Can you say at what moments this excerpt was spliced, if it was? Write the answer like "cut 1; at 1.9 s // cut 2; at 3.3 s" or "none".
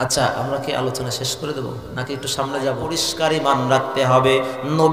cut 1; at 3.1 s